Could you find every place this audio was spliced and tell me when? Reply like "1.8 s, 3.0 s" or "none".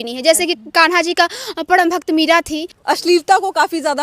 2.7 s